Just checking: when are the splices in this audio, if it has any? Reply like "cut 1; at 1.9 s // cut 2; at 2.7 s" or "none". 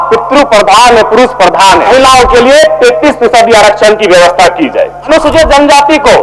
cut 1; at 1.9 s // cut 2; at 5.1 s

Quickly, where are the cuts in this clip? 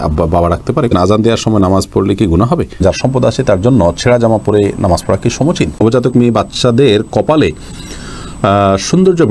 cut 1; at 0.9 s // cut 2; at 2.8 s // cut 3; at 5.8 s

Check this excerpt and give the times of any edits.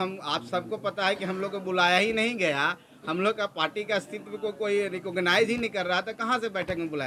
none

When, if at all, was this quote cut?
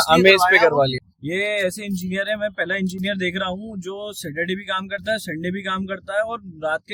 cut 1; at 0.9 s

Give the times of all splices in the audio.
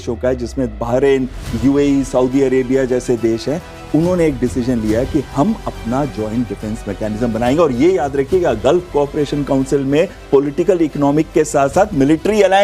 none

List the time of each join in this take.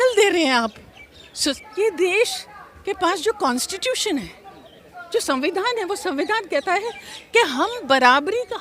cut 1; at 1.6 s

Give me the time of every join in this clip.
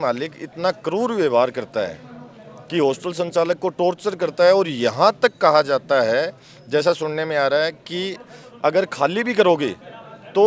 none

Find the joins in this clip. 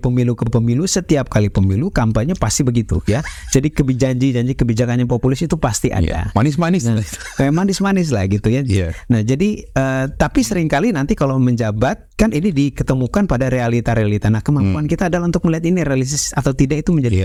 none

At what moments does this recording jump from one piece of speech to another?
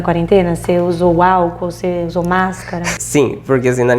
cut 1; at 3.0 s

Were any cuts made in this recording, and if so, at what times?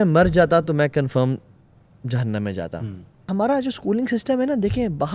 cut 1; at 3.2 s

